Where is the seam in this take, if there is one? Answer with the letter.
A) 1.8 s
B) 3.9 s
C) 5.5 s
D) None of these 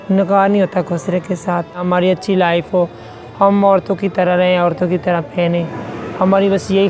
A